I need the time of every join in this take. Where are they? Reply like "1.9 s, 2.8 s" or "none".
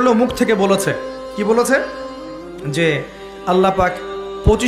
none